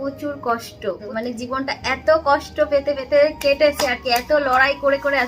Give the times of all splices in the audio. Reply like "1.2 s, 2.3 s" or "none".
1.0 s